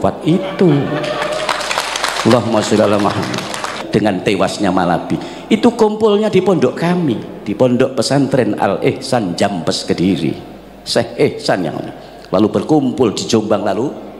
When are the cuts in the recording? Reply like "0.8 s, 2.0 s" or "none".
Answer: 3.8 s